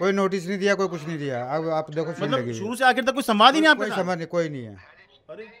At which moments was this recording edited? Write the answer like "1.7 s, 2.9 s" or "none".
none